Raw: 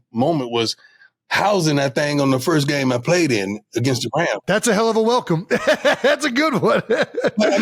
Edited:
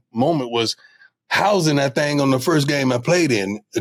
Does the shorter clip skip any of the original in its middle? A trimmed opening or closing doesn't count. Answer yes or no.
no